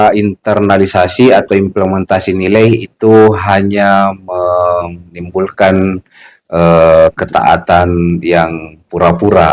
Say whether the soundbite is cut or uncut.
uncut